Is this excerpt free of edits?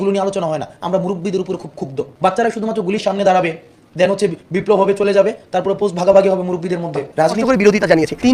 no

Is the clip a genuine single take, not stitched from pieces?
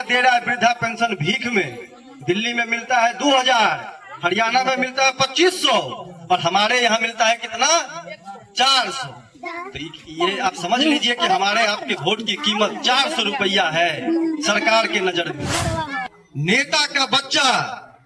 no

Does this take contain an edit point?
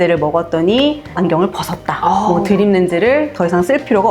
yes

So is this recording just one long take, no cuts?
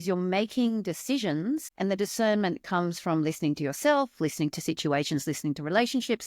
no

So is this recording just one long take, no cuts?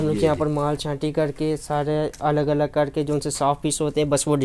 yes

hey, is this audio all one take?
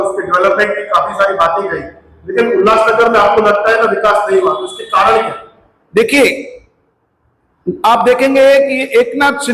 yes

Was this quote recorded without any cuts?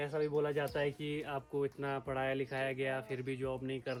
yes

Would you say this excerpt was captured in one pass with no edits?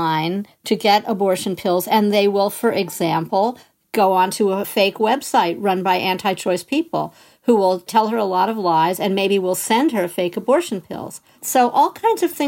no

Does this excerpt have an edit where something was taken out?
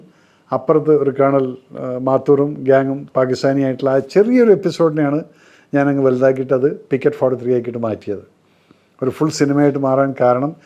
no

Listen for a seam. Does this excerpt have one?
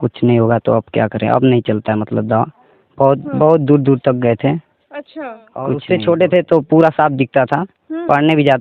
yes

